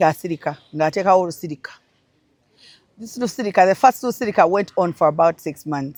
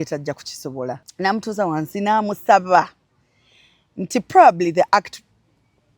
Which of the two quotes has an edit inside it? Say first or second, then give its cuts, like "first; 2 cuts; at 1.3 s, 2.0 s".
second; 1 cut; at 1.1 s